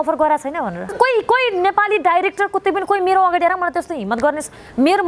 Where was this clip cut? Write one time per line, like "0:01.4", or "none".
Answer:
0:00.9